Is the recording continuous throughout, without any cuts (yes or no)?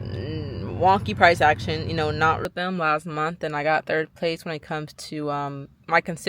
no